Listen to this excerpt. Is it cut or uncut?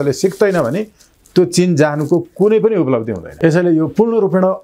cut